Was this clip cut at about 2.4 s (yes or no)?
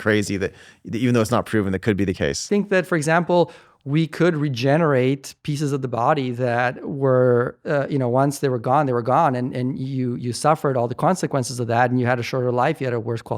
yes